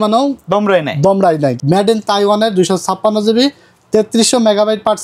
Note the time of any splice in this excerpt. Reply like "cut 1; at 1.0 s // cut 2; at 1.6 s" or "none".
cut 1; at 1.6 s